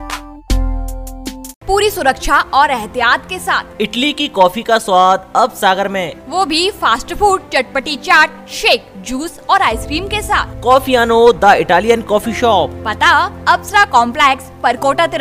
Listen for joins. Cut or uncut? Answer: uncut